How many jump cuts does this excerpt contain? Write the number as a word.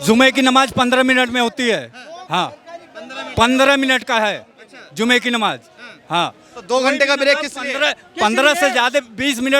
zero